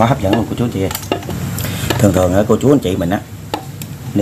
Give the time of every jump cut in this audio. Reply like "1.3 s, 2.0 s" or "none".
1.5 s